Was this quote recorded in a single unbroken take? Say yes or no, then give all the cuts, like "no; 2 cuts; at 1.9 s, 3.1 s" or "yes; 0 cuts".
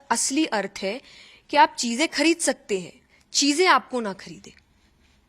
yes; 0 cuts